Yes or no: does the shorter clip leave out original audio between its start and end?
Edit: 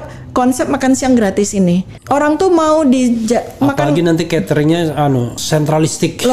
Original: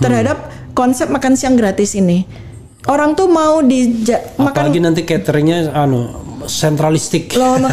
yes